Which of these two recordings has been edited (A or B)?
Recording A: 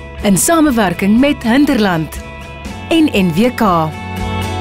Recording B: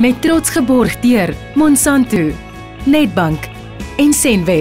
B